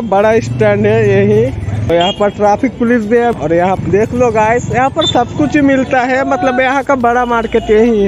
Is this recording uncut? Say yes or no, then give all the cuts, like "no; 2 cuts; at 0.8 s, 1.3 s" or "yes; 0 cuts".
no; 2 cuts; at 1.9 s, 3.8 s